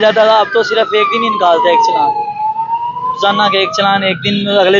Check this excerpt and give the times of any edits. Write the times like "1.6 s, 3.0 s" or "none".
none